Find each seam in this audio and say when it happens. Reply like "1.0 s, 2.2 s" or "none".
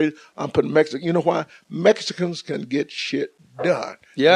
none